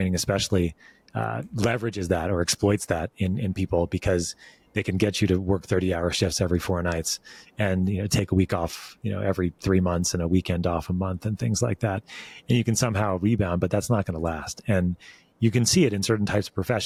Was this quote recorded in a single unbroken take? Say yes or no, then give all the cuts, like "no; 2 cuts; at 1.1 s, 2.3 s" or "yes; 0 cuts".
yes; 0 cuts